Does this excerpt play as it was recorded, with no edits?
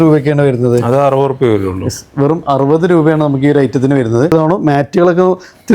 no; 1 cut; at 4.3 s

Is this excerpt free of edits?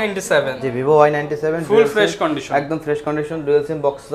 yes; 0 cuts

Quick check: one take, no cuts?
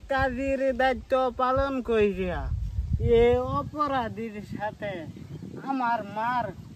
yes; 0 cuts

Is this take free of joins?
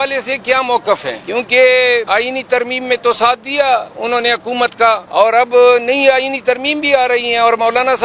no; 3 cuts; at 1.2 s, 2.1 s, 5.1 s

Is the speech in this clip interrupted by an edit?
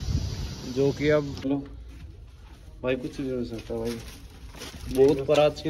yes; 1 cut; at 1.5 s

